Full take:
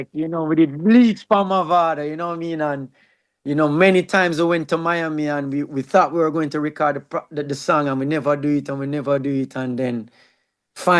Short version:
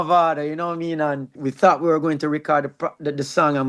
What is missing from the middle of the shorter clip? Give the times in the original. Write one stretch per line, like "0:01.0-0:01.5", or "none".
0:03.0-0:05.7